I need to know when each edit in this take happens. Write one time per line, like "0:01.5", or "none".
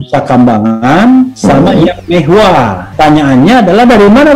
0:02.8